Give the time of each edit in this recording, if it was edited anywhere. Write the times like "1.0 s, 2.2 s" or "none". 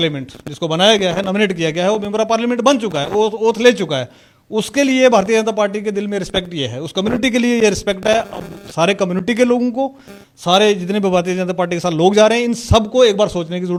none